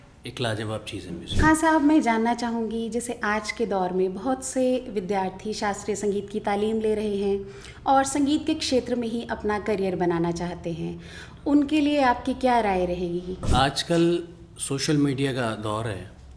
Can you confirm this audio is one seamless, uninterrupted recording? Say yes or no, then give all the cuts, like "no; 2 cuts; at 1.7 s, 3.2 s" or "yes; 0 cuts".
no; 2 cuts; at 1.2 s, 13.5 s